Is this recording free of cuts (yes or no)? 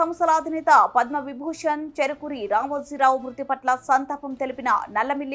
yes